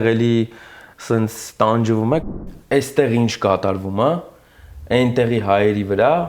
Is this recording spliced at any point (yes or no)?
yes